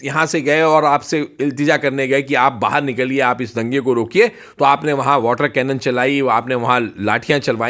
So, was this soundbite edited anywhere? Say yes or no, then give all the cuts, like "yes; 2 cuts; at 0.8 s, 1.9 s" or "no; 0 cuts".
no; 0 cuts